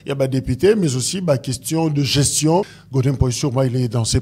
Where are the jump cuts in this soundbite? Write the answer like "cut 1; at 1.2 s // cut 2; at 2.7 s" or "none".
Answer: cut 1; at 2.8 s